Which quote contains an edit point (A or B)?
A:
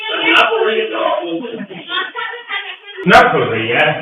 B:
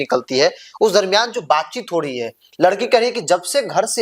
A